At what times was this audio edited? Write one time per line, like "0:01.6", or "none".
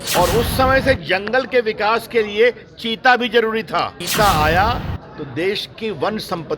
0:04.0